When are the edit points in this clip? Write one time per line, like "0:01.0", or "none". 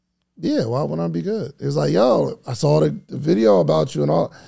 none